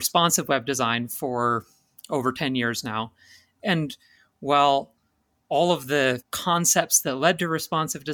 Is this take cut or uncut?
cut